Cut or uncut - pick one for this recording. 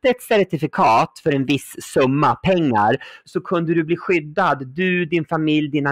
cut